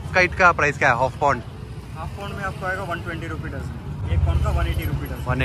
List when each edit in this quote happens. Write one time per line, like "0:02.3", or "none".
0:04.1